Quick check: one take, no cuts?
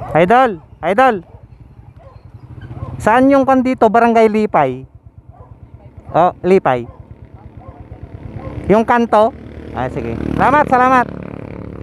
yes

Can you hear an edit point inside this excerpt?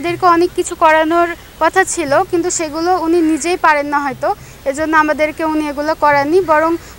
no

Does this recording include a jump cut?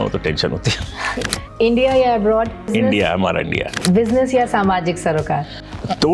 yes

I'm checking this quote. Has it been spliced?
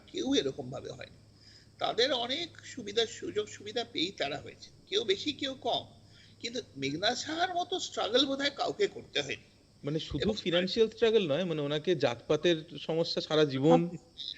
no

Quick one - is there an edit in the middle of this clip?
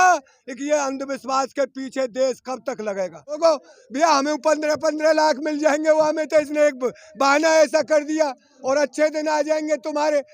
yes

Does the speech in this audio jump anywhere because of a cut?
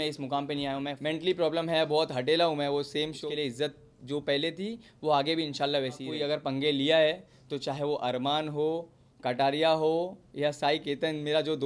yes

